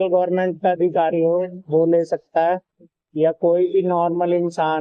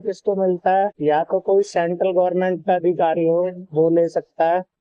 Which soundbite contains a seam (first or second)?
second